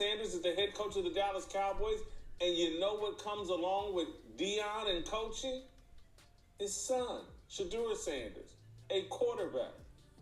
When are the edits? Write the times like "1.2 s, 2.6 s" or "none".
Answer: none